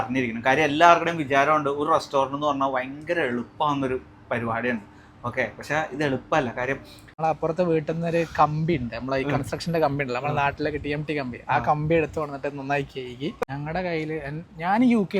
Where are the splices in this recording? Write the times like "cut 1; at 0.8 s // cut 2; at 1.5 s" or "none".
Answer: cut 1; at 7.1 s // cut 2; at 13.5 s